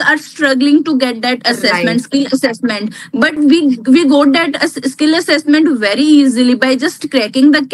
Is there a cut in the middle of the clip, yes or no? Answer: no